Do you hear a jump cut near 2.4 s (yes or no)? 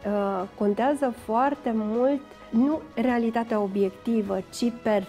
yes